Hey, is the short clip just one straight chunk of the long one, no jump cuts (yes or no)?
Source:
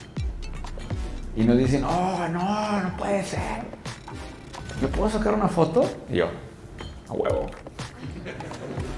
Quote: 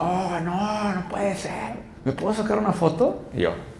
no